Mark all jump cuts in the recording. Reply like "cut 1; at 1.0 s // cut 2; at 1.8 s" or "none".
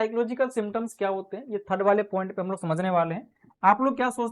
none

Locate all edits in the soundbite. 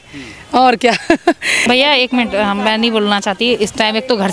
cut 1; at 1.6 s

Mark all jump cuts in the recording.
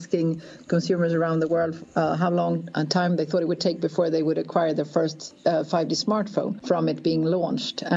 cut 1; at 6.6 s

